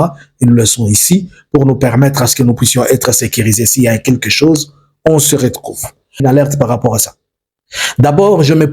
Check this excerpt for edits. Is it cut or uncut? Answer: cut